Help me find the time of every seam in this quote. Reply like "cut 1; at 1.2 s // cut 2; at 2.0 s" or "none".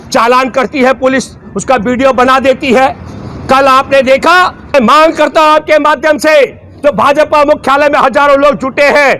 cut 1; at 4.7 s